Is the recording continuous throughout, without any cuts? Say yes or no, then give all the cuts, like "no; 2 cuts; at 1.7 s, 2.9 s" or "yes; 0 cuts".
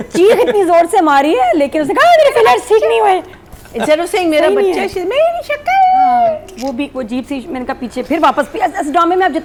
yes; 0 cuts